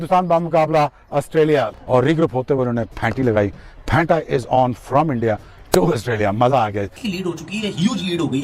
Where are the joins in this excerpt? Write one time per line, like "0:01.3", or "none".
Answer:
0:06.8

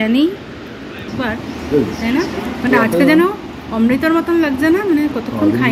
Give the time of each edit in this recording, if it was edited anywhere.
0:01.1

